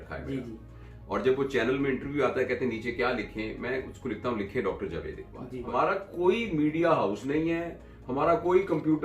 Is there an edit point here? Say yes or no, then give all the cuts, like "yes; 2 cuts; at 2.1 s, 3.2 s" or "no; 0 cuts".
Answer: yes; 1 cut; at 5.7 s